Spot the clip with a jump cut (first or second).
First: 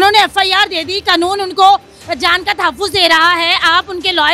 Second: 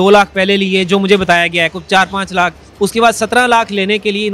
second